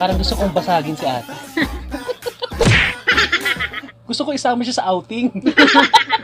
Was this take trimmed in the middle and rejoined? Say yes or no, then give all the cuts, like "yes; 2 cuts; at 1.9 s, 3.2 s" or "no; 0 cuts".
yes; 1 cut; at 3.9 s